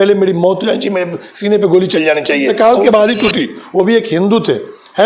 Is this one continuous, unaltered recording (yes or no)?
no